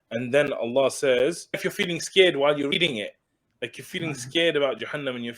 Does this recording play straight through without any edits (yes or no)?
no